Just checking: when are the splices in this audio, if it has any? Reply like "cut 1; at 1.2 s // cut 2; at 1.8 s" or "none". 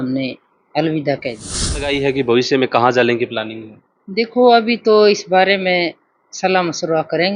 cut 1; at 1.9 s